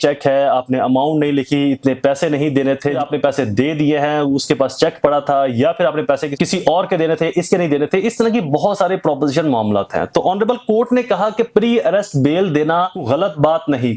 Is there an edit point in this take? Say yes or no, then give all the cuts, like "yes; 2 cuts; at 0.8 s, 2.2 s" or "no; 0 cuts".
yes; 3 cuts; at 3.0 s, 6.3 s, 13.0 s